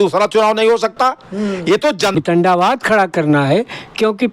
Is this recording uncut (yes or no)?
no